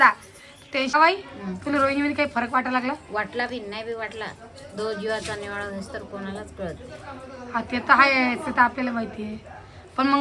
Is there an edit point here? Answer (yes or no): yes